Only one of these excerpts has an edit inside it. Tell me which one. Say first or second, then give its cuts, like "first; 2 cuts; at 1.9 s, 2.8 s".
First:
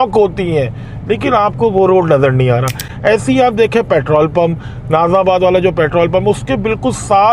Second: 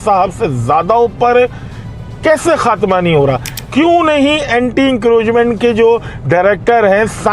second; 1 cut; at 3.6 s